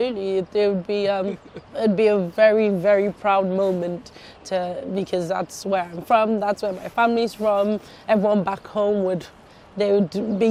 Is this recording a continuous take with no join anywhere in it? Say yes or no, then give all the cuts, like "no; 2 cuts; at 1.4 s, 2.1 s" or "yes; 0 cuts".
yes; 0 cuts